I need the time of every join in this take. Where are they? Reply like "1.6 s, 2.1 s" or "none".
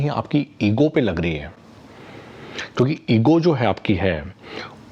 none